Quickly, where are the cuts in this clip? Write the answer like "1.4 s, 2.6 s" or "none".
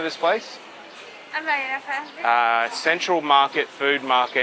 none